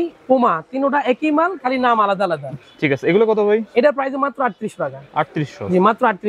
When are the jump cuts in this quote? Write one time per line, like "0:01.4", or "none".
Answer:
none